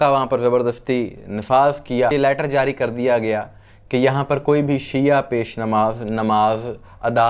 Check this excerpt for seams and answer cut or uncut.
cut